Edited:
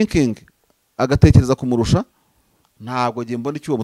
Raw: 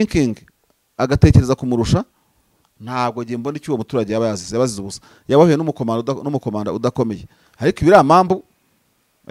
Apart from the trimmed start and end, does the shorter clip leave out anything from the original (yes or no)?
no